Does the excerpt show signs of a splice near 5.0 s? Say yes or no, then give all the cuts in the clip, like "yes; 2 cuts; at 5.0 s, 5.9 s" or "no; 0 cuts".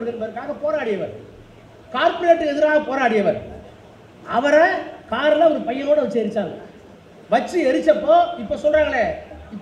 no; 0 cuts